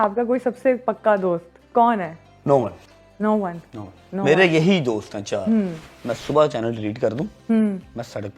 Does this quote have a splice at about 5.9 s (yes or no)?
yes